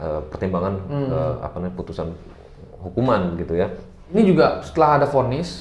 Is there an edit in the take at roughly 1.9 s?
no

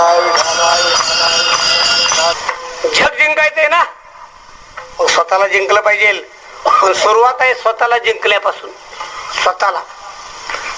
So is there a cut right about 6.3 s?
no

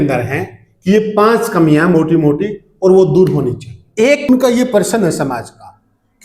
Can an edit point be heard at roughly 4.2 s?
yes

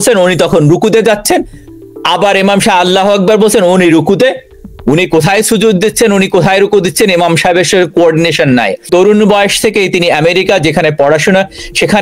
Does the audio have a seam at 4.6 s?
no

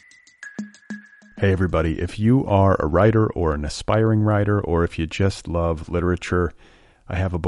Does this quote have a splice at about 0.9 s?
yes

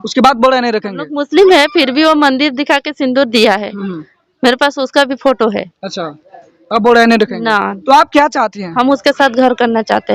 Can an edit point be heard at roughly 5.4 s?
no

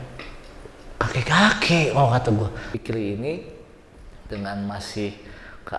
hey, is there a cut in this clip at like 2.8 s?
yes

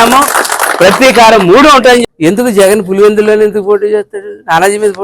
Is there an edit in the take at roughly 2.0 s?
yes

